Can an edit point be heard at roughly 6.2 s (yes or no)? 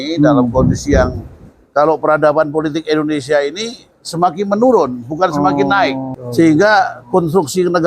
yes